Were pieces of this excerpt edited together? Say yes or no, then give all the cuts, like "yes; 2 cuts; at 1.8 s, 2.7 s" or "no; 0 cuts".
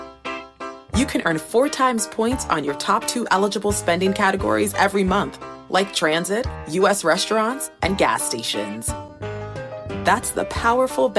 no; 0 cuts